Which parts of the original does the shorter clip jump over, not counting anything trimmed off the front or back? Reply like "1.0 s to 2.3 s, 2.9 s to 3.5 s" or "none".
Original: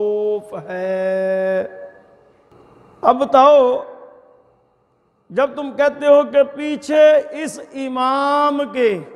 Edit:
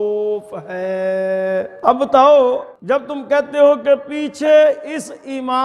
1.7 s to 2.9 s, 3.9 s to 5.2 s